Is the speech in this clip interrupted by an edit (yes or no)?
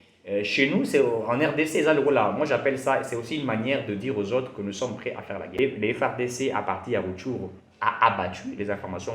yes